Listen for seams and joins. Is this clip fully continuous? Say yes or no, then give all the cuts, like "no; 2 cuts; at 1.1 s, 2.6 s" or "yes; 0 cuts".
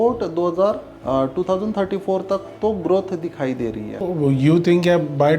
no; 2 cuts; at 0.9 s, 4.1 s